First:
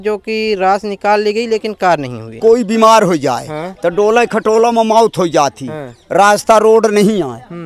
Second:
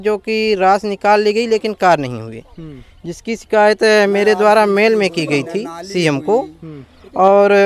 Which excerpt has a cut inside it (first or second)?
first